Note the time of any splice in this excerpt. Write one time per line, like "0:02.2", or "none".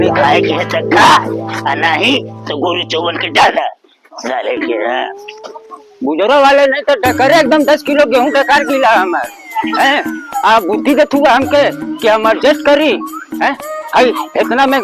none